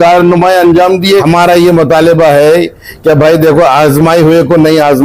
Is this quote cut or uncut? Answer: cut